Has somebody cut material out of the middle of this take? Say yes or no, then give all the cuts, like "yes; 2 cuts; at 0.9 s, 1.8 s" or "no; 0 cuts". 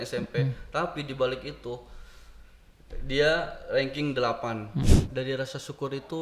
yes; 1 cut; at 4.8 s